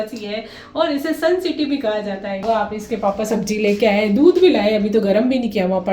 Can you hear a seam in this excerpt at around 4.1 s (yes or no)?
no